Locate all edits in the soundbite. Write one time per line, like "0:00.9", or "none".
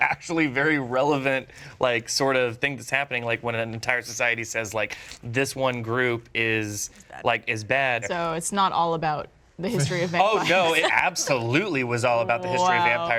0:08.0
0:10.8